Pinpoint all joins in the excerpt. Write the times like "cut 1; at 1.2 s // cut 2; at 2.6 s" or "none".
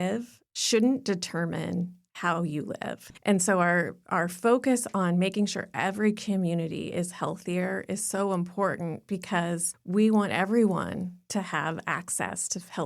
cut 1; at 3.1 s // cut 2; at 9.7 s